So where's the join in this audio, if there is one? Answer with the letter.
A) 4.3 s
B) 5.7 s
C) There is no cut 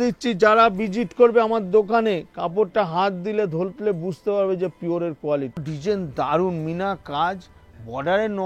B